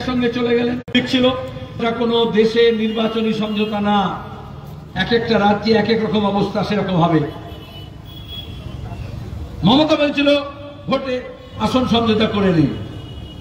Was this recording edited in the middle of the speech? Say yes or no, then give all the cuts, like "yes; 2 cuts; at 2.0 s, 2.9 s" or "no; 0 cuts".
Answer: yes; 1 cut; at 1.8 s